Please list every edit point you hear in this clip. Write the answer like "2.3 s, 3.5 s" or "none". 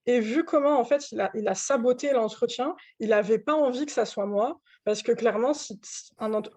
none